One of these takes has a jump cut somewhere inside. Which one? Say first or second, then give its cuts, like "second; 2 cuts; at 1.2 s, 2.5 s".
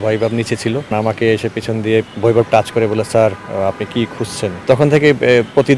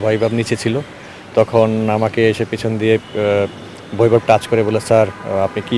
first; 3 cuts; at 0.9 s, 2.1 s, 4.6 s